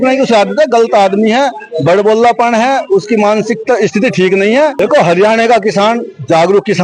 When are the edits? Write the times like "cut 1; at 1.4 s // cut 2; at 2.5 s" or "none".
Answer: cut 1; at 4.8 s